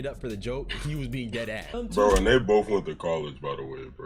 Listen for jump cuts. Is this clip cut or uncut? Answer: cut